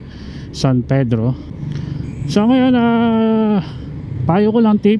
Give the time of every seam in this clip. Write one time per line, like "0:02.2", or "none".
0:01.5